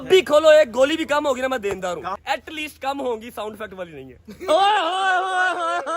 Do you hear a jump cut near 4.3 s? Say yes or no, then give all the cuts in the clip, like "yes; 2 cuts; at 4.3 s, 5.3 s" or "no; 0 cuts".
no; 1 cut; at 2.1 s